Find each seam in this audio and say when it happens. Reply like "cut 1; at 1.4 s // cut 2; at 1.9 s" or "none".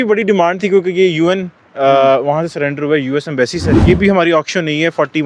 cut 1; at 3.7 s